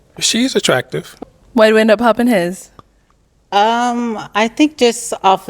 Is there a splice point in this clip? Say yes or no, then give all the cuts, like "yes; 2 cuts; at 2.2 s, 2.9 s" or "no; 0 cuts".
yes; 1 cut; at 1.2 s